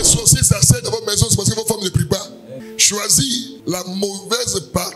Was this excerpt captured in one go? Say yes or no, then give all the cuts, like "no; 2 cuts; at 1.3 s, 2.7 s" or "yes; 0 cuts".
no; 1 cut; at 2.6 s